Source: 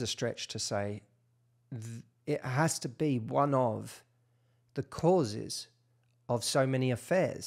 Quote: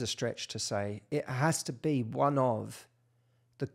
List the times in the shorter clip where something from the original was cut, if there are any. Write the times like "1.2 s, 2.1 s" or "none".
1.0 s